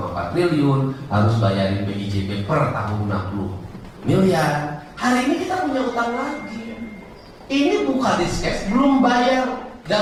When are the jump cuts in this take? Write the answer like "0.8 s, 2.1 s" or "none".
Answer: none